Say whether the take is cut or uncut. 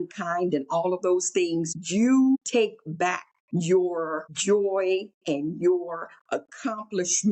cut